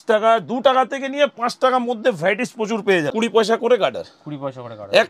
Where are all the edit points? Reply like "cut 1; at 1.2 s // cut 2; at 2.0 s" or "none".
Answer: cut 1; at 3.1 s